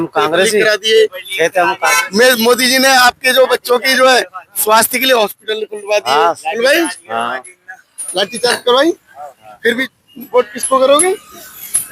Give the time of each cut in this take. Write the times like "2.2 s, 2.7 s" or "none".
9.8 s